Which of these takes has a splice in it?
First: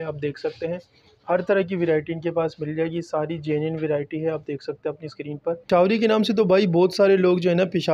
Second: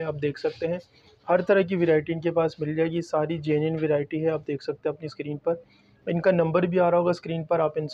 first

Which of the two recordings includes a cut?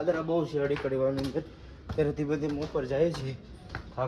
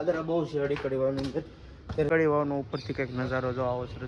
second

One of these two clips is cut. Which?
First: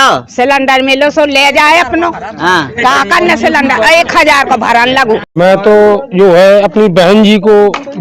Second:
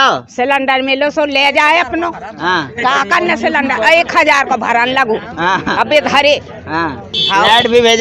first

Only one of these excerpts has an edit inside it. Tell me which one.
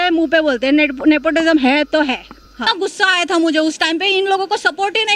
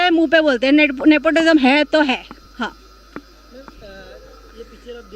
first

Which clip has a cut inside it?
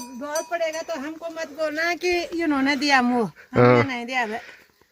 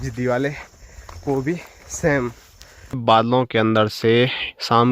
second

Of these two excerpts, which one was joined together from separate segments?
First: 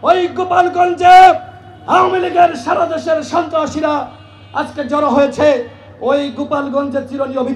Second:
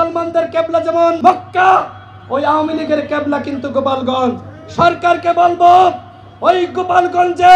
second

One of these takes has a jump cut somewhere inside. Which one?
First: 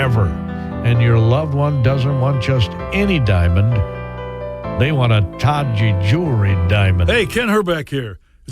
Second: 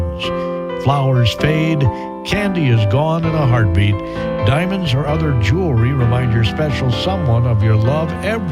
first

